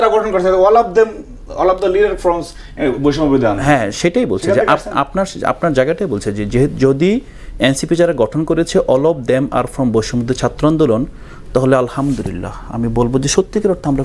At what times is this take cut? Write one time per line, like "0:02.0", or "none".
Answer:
none